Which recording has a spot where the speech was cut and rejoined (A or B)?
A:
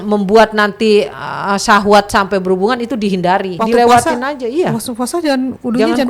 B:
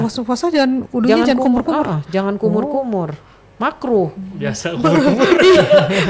A